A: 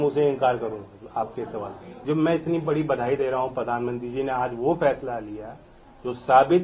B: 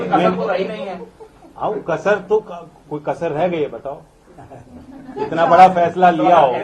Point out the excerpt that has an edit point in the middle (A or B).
A